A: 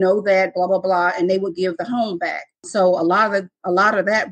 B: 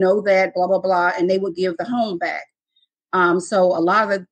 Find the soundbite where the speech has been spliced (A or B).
A